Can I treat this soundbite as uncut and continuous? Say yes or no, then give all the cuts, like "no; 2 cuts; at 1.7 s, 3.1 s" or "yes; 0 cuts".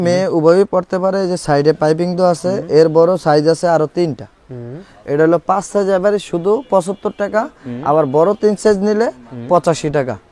yes; 0 cuts